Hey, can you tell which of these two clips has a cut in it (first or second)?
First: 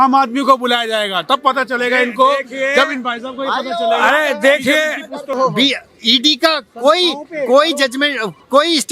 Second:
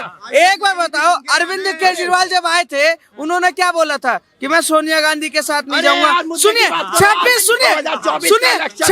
first